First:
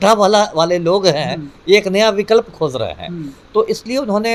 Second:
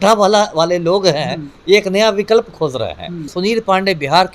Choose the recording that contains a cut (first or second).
second